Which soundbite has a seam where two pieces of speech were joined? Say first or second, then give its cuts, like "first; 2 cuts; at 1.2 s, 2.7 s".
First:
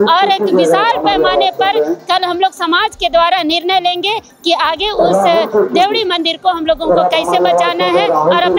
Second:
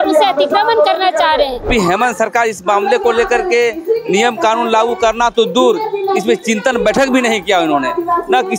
second; 1 cut; at 1.7 s